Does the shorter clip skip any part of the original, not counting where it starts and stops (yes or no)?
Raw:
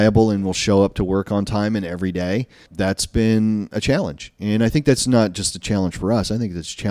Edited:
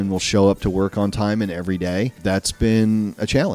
yes